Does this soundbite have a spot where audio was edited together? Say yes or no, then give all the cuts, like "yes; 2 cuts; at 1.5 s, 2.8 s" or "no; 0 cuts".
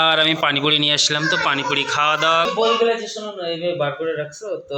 yes; 1 cut; at 2.5 s